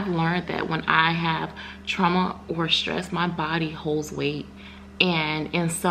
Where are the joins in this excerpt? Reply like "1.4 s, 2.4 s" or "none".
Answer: none

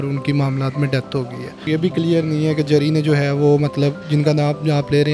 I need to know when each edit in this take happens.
1.7 s

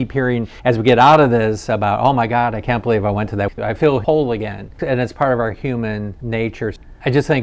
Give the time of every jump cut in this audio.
3.5 s, 4.7 s

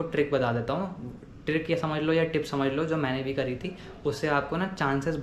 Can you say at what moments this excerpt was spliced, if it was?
none

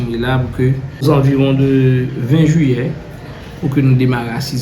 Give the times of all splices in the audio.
1.0 s

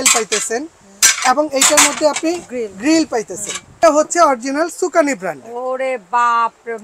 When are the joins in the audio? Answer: 3.8 s

